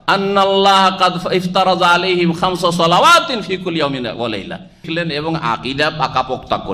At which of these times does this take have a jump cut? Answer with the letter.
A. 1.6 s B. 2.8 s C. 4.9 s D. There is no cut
C